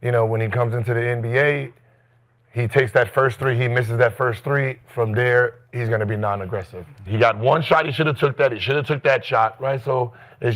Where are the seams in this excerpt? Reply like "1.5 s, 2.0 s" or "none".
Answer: 7.0 s

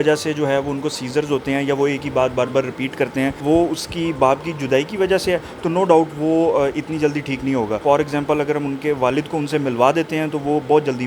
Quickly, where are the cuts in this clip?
3.4 s, 7.8 s

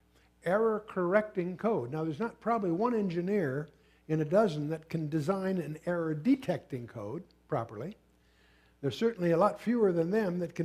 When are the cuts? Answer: 3.3 s

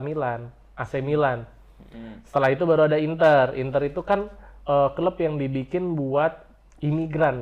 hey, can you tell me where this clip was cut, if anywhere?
none

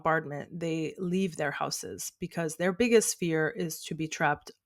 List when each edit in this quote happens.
none

